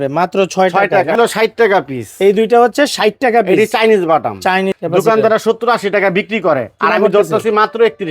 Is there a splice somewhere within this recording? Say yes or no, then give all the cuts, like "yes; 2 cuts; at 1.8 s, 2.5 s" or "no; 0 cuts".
yes; 2 cuts; at 1.2 s, 4.8 s